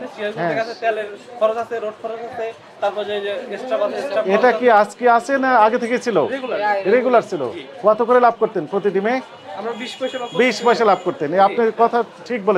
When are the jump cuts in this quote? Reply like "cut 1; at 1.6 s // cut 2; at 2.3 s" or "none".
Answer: none